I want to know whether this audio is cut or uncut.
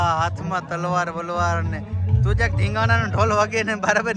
uncut